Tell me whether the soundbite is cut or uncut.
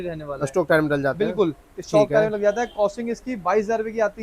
uncut